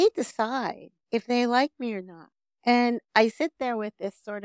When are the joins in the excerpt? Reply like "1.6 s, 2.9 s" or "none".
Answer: 2.5 s